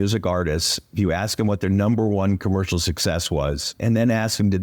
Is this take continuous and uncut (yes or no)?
no